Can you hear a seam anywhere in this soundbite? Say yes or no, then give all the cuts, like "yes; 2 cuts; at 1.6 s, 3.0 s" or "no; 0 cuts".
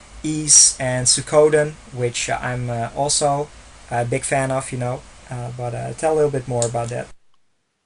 no; 0 cuts